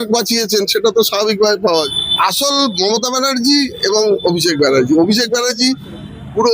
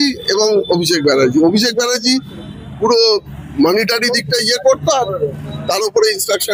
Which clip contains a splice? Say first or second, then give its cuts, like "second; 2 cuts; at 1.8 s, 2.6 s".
first; 1 cut; at 1.9 s